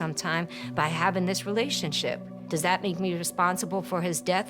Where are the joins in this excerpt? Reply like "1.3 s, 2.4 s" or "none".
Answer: 2.4 s